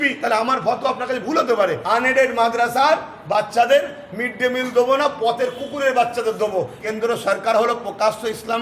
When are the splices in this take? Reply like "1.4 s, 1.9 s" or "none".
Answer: 1.8 s, 6.8 s